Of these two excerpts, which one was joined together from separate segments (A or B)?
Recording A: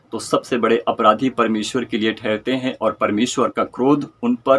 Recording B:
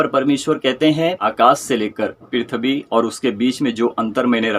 B